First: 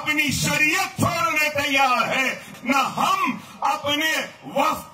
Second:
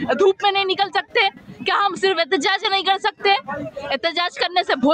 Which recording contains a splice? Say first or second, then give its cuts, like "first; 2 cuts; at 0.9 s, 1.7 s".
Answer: first; 1 cut; at 2.4 s